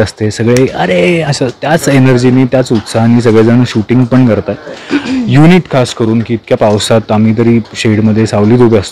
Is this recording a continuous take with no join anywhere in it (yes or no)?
yes